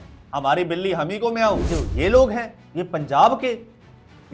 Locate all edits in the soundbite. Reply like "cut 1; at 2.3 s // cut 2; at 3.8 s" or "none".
cut 1; at 1.7 s // cut 2; at 2.6 s

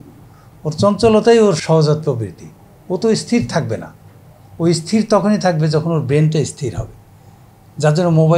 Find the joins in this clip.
cut 1; at 1.6 s

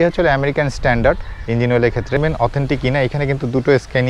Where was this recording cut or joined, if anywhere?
cut 1; at 2.2 s

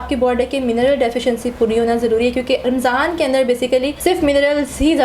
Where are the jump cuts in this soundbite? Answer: cut 1; at 2.6 s // cut 2; at 3.9 s

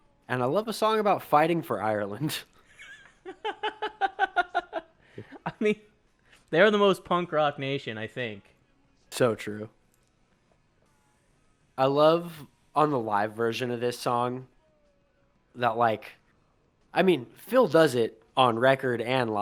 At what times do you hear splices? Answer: none

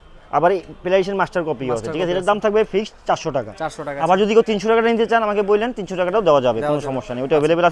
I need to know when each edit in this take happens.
none

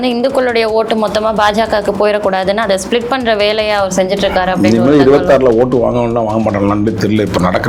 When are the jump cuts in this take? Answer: none

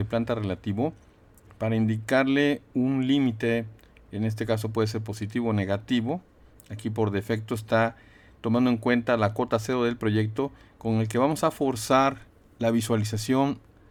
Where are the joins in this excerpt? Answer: none

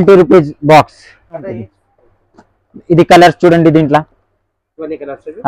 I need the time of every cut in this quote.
cut 1; at 1.8 s

